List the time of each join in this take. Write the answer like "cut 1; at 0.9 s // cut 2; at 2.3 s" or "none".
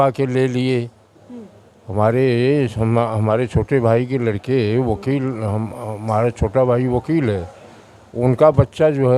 none

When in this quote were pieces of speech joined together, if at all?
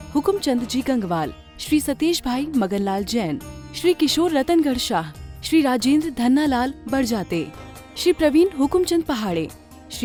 none

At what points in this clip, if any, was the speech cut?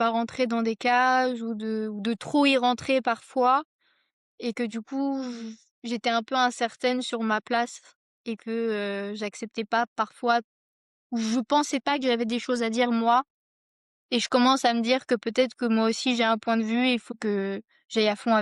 cut 1; at 17.1 s

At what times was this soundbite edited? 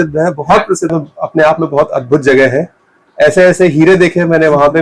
cut 1; at 0.9 s

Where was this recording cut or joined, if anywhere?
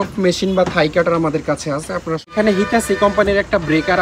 cut 1; at 2.2 s

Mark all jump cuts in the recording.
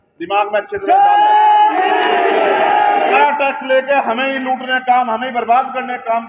cut 1; at 3.1 s

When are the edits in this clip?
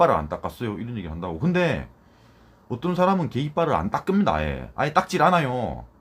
none

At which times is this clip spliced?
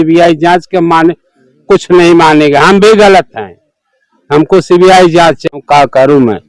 cut 1; at 5.6 s

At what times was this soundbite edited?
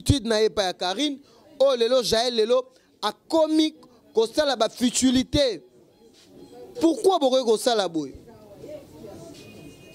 none

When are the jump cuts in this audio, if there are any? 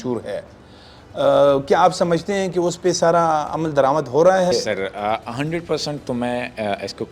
cut 1; at 4.5 s

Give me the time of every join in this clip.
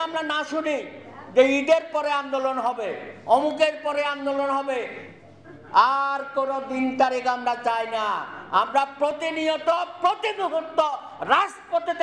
none

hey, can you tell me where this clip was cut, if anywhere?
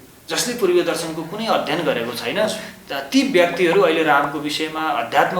none

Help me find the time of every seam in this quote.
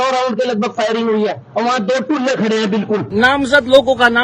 cut 1; at 3.1 s

